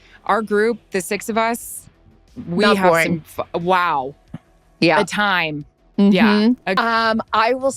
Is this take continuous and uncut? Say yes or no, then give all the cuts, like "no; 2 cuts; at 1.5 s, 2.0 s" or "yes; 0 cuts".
no; 1 cut; at 6.8 s